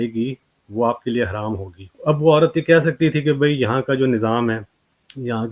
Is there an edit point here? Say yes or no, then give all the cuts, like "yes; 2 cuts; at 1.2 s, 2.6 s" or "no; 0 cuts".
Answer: yes; 1 cut; at 1.9 s